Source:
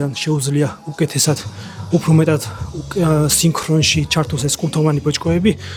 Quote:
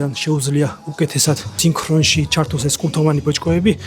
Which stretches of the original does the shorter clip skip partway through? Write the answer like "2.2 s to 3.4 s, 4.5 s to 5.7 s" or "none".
1.6 s to 3.3 s